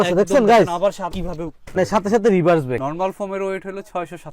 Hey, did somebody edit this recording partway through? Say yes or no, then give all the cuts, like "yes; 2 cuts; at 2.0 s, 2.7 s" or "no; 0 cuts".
yes; 1 cut; at 2.8 s